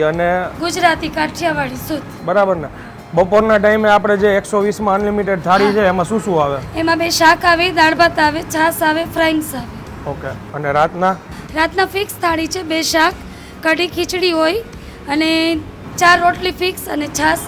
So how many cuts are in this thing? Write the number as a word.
zero